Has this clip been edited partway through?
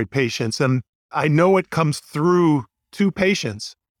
no; 0 cuts

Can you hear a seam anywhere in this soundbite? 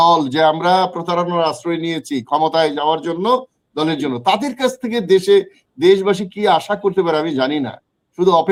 no; 0 cuts

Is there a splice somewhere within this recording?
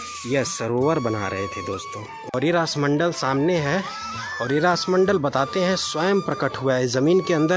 yes; 1 cut; at 2.3 s

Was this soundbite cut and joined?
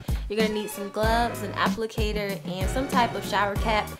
no; 0 cuts

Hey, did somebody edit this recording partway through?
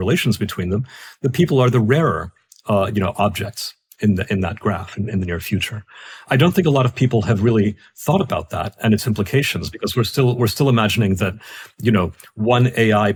no; 0 cuts

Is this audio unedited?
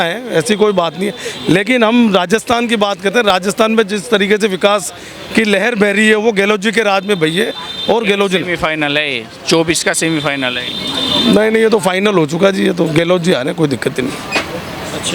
yes; 0 cuts

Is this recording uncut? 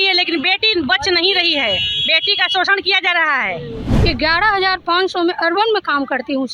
no; 1 cut; at 3.9 s

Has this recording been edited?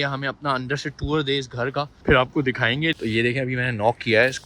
yes; 2 cuts; at 1.9 s, 2.9 s

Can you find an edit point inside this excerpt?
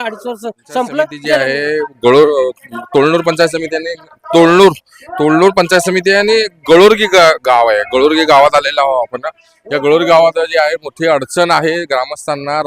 yes; 1 cut; at 1.4 s

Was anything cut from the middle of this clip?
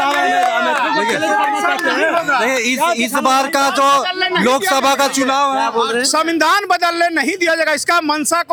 no; 0 cuts

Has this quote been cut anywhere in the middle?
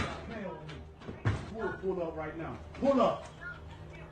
no; 0 cuts

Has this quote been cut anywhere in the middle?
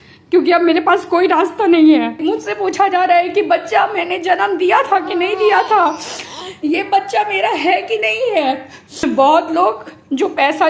yes; 2 cuts; at 2.2 s, 9.0 s

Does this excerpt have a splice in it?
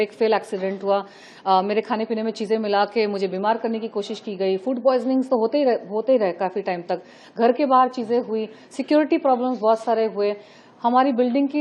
no; 0 cuts

